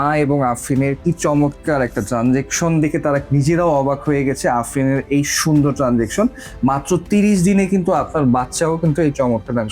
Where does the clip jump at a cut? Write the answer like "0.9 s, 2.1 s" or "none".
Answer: 1.0 s